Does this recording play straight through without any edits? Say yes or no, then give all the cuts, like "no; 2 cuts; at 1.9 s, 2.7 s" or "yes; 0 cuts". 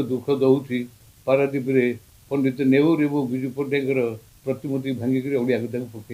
no; 1 cut; at 2.1 s